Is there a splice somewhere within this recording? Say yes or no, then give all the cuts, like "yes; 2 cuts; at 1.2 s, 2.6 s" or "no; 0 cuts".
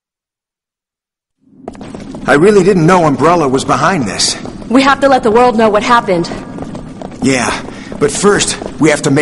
yes; 1 cut; at 5.1 s